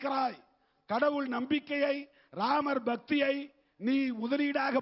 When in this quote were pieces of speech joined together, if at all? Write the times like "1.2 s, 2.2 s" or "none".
none

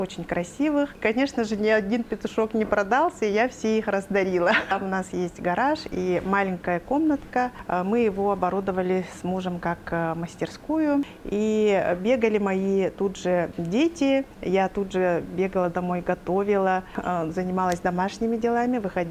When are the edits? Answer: 1.0 s, 4.7 s, 7.6 s, 11.2 s, 14.4 s, 16.9 s

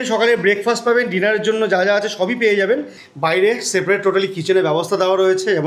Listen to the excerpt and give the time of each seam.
3.0 s

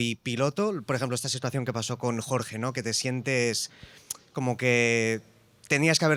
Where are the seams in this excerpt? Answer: none

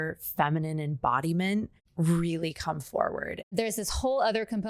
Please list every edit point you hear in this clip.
1.8 s, 3.5 s

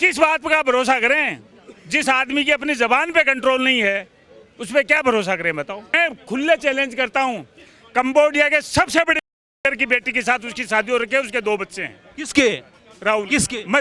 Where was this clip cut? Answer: 6.0 s

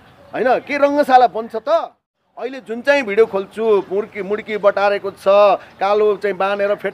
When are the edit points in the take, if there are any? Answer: 2.6 s

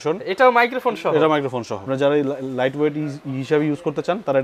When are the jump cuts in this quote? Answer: 1.8 s

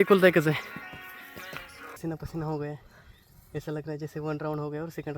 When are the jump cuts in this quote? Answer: 2.0 s

